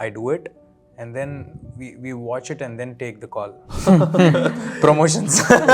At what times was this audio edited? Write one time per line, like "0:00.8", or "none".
0:03.6